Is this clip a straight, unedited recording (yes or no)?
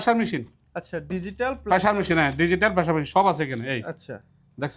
yes